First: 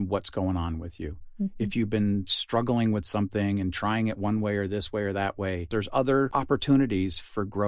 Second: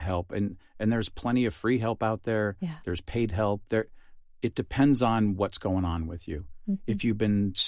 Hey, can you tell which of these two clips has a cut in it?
first; 2 cuts; at 5.7 s, 6.3 s

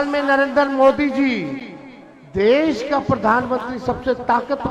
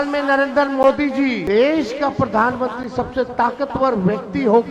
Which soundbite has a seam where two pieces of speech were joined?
second; 1 cut; at 1.4 s

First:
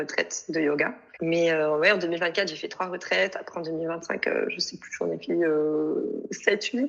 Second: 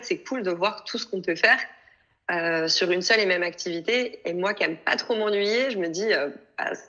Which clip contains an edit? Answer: first; 1 cut; at 1.0 s

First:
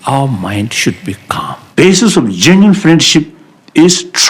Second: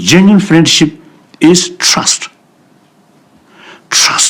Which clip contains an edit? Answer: first; 1 cut; at 1.2 s

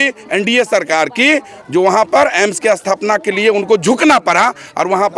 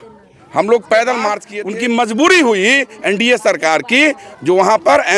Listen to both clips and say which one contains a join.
second; 1 cut; at 1.5 s

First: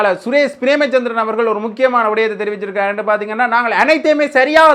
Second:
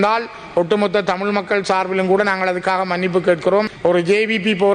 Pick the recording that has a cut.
second; 1 cut; at 3.7 s

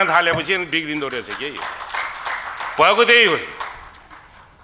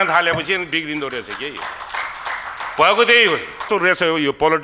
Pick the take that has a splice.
second; 1 cut; at 3.7 s

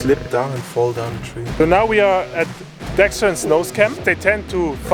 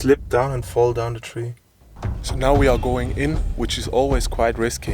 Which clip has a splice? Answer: first; 2 cuts; at 1.4 s, 4.0 s

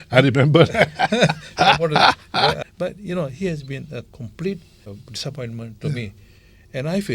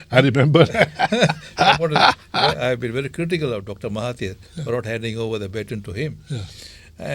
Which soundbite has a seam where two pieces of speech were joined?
first; 2 cuts; at 2.6 s, 4.9 s

